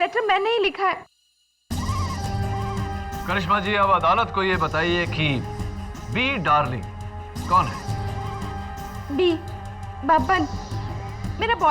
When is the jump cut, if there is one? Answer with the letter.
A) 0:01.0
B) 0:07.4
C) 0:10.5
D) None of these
A